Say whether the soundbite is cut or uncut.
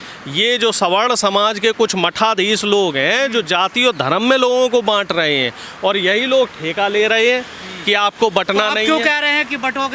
uncut